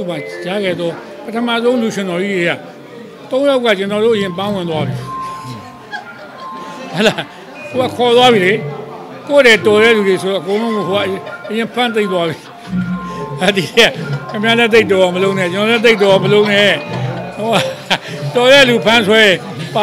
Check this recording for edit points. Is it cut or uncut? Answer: uncut